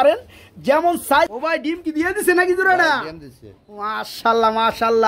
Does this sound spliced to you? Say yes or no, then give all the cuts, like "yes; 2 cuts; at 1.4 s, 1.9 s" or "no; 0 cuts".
yes; 1 cut; at 1.3 s